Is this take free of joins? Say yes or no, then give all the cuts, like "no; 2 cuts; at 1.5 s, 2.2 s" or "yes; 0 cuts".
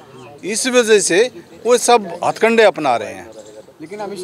yes; 0 cuts